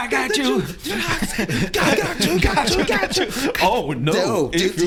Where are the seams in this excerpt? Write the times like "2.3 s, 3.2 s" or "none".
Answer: none